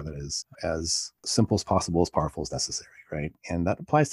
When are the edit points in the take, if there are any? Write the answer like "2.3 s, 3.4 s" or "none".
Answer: none

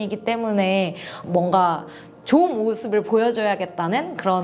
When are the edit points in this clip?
1.1 s

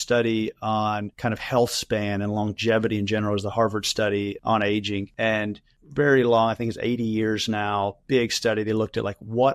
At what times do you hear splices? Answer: 1.1 s

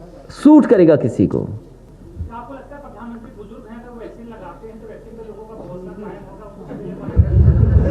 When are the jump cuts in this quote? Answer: 1.9 s

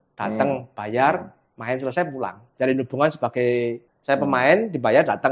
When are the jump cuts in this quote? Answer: 2.4 s, 3.9 s

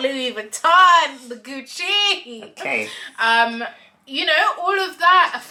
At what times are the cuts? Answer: none

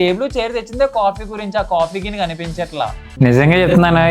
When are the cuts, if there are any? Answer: 3.0 s

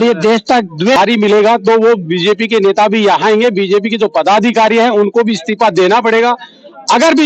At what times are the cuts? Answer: 1.0 s

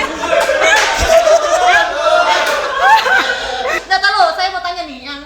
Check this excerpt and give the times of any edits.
3.8 s

